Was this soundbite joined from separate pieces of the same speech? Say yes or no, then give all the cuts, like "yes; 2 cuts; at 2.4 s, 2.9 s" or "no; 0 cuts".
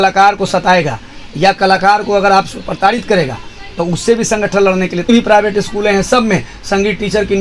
yes; 1 cut; at 5.1 s